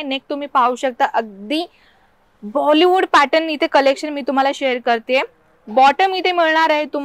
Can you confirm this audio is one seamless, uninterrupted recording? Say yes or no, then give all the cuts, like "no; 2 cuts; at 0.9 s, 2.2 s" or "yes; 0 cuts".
yes; 0 cuts